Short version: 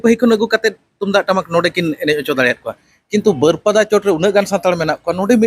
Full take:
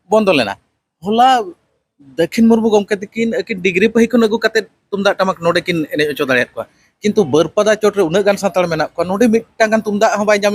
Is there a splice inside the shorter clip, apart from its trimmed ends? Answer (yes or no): no